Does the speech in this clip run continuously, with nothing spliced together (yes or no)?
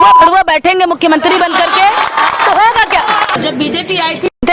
no